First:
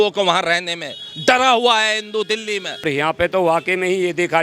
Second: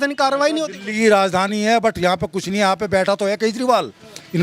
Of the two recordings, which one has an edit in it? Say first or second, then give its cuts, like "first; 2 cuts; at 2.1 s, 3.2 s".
first; 1 cut; at 2.9 s